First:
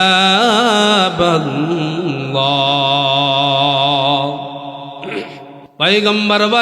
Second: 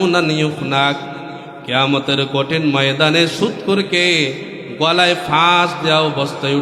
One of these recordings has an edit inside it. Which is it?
first; 1 cut; at 5.6 s

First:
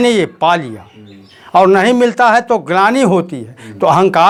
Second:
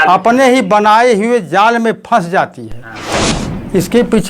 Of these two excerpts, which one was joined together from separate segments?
second; 1 cut; at 3.2 s

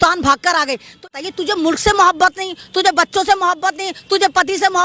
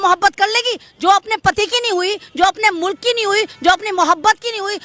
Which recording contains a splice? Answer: first; 1 cut; at 1.1 s

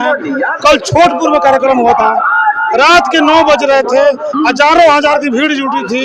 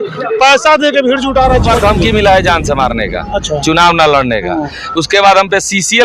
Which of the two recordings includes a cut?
second; 1 cut; at 1.7 s

